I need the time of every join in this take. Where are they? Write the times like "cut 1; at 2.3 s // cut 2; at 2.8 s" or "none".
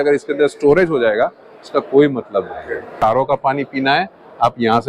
cut 1; at 3.2 s